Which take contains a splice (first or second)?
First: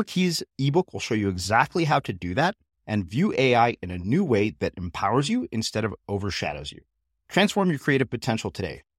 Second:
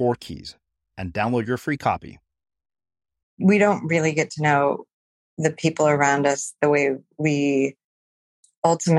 second